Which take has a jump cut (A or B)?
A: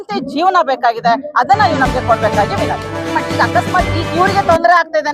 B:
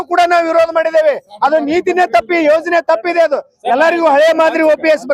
A